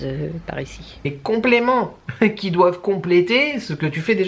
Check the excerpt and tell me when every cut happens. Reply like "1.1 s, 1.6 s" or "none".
1.1 s

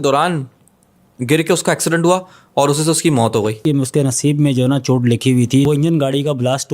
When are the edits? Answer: 3.6 s, 5.6 s

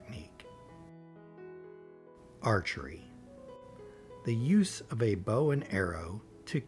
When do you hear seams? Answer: none

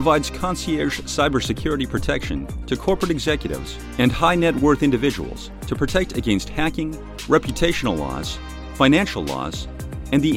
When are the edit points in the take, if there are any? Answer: none

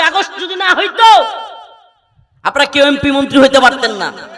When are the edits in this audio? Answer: none

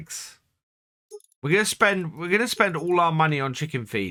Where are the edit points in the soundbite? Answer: none

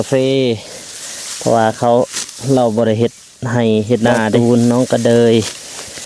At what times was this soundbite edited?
4.3 s

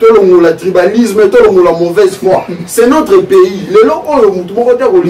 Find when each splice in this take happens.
none

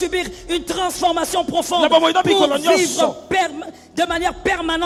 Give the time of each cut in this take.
none

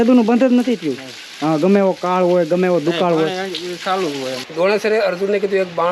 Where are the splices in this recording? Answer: 4.4 s

